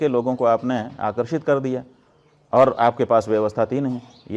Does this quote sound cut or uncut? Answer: uncut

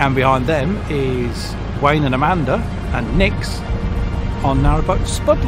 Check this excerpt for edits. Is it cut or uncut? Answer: uncut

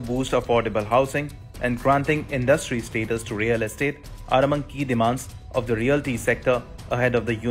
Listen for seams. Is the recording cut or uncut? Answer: uncut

